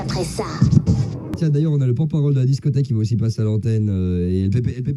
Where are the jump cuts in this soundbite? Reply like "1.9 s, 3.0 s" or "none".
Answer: 1.2 s

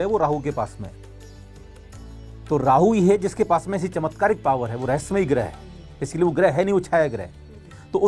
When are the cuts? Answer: none

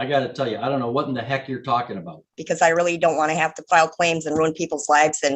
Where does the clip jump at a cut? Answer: 2.4 s

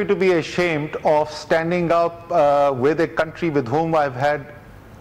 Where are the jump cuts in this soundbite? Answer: none

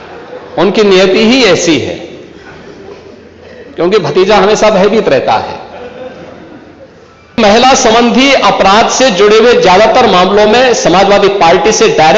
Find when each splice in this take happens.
7.4 s

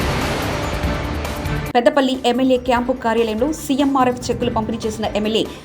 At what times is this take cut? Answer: 1.5 s

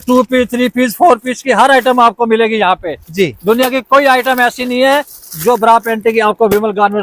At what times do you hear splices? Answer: none

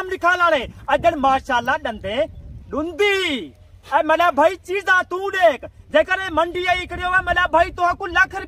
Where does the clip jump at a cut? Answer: none

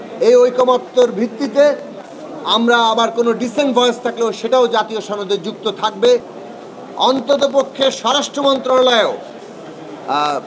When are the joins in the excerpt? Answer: 6.4 s

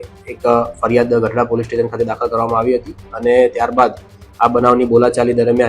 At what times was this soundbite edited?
none

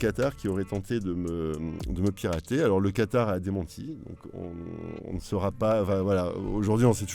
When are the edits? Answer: none

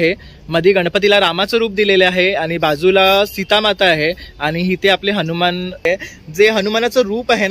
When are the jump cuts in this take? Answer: 5.9 s

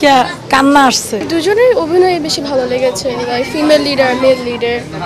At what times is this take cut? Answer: 1.1 s

